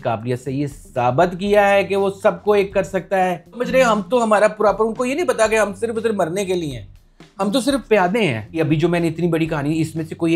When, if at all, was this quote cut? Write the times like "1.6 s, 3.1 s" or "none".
3.6 s, 8.4 s